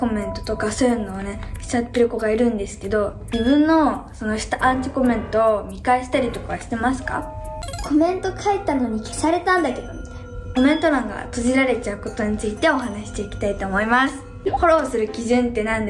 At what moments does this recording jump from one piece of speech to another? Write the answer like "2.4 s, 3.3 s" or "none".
3.2 s, 7.7 s, 10.5 s, 14.6 s